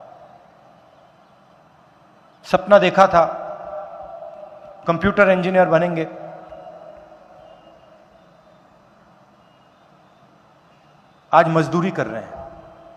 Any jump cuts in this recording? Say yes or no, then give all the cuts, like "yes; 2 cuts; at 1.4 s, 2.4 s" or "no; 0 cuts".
no; 0 cuts